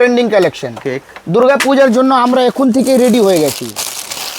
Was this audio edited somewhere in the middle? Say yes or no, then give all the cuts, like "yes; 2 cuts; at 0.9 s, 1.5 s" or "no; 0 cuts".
no; 0 cuts